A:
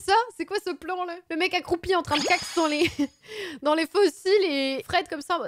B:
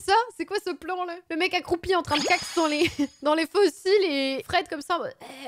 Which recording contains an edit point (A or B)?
B